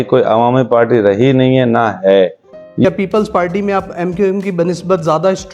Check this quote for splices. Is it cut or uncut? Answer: cut